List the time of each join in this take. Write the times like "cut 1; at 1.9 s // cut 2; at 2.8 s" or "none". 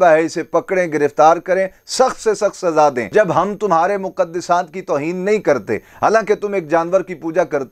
cut 1; at 3.0 s